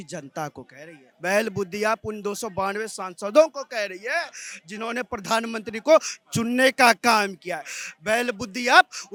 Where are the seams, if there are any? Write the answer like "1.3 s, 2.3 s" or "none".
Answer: none